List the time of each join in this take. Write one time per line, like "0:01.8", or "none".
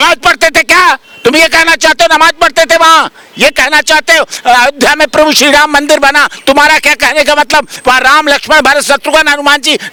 none